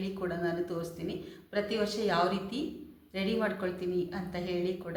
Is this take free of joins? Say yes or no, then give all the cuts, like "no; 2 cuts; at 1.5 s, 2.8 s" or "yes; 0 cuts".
yes; 0 cuts